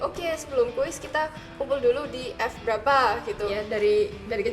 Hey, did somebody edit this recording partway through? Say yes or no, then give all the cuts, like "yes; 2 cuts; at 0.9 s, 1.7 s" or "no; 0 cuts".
yes; 1 cut; at 3.5 s